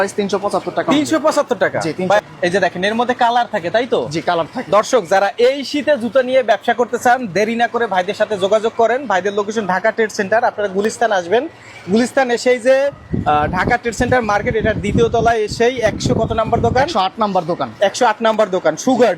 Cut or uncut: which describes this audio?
cut